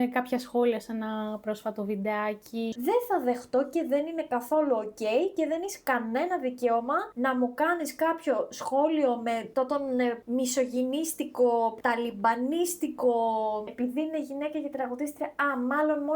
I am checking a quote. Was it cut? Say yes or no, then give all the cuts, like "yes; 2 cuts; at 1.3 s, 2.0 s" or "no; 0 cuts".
yes; 2 cuts; at 2.8 s, 13.7 s